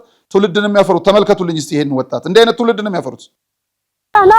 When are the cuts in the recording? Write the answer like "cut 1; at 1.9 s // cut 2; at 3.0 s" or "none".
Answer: none